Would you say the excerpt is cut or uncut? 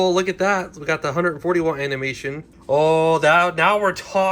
cut